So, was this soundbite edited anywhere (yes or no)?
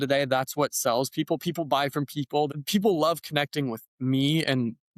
yes